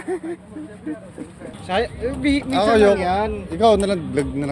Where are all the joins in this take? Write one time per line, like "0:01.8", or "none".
0:01.6